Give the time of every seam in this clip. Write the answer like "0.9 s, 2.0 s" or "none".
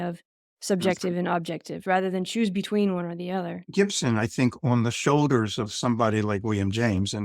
1.8 s, 3.6 s